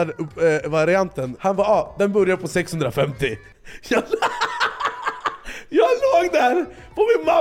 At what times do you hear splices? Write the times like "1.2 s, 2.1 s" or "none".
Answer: 1.3 s